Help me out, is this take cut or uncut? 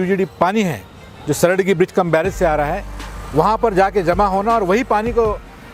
uncut